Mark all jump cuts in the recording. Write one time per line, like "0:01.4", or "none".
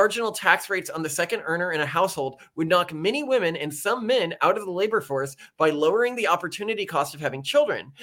none